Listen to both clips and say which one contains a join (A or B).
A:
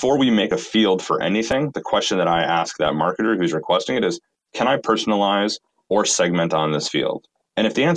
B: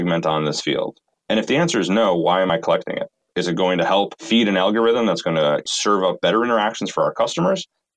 B